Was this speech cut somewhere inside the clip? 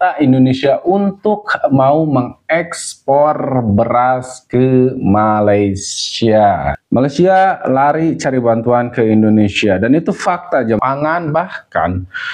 yes; 2 cuts; at 6.7 s, 10.8 s

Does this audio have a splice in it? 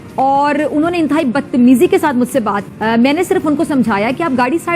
yes; 1 cut; at 2.7 s

